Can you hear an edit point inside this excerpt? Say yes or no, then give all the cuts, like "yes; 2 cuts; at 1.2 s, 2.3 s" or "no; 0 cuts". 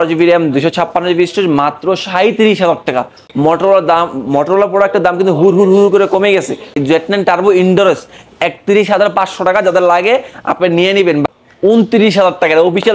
yes; 3 cuts; at 3.2 s, 6.8 s, 11.3 s